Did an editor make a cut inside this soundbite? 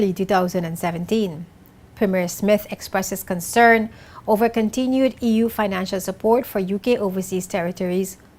no; 0 cuts

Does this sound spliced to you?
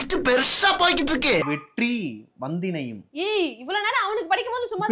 yes; 1 cut; at 1.4 s

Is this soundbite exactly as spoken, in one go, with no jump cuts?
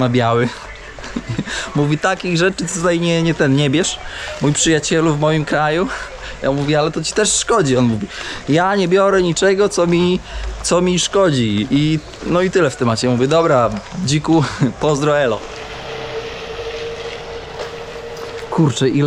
yes; 0 cuts

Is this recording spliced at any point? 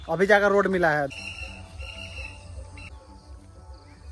yes; 2 cuts; at 1.1 s, 2.9 s

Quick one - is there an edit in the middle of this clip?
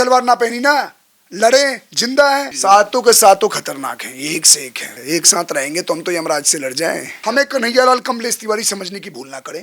yes; 3 cuts; at 2.5 s, 4.9 s, 7.1 s

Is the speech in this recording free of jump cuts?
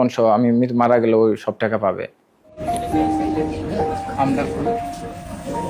no; 1 cut; at 2.5 s

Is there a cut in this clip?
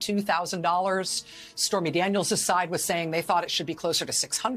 no; 0 cuts

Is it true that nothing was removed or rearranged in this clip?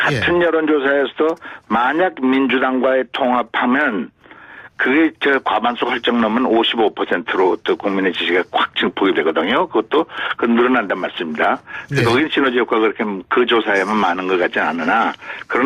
yes; 0 cuts

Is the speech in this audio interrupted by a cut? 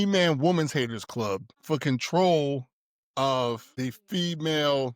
yes; 2 cuts; at 1.5 s, 3.7 s

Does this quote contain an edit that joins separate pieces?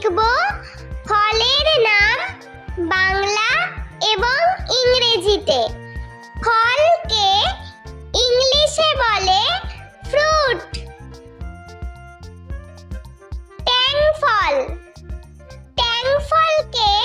no; 0 cuts

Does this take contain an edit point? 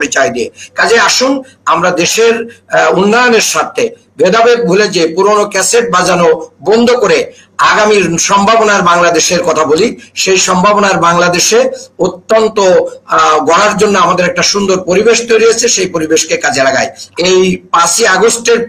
yes; 1 cut; at 17.0 s

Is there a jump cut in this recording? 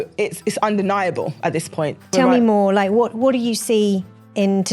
yes; 1 cut; at 2.1 s

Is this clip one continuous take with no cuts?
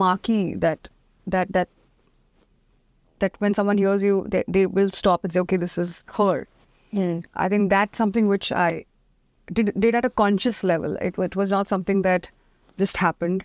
yes; 0 cuts

